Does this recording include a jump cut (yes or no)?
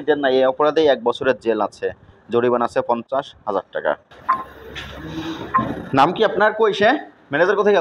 yes